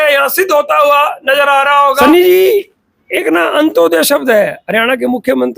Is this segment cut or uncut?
cut